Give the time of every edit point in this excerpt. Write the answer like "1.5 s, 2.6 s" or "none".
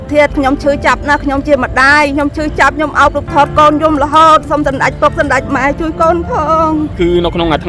none